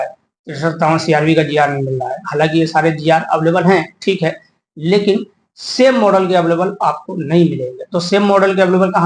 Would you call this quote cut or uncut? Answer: uncut